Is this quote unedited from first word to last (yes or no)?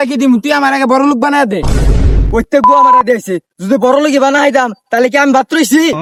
yes